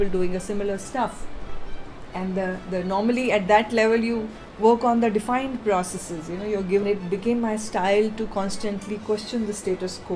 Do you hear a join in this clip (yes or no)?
yes